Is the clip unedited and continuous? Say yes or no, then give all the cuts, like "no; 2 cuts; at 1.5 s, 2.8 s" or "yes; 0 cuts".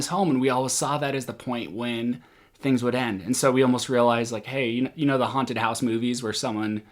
yes; 0 cuts